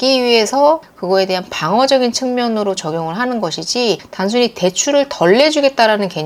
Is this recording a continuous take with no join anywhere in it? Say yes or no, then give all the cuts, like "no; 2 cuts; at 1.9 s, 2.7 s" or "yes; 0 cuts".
yes; 0 cuts